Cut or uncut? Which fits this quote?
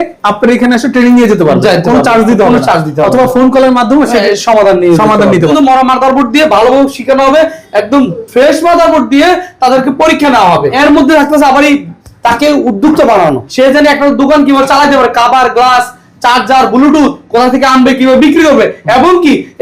cut